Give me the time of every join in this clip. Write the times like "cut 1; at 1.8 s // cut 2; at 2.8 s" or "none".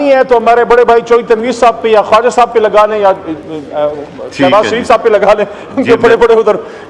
none